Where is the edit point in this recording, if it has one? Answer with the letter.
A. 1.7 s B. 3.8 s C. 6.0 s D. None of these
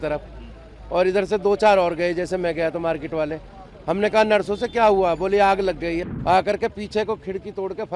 C